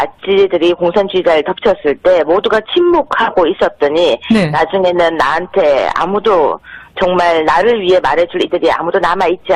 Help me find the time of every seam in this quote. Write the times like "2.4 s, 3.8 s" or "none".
none